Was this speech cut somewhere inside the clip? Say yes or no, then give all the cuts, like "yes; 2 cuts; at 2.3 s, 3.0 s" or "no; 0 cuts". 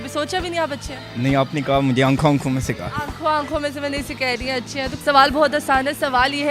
no; 0 cuts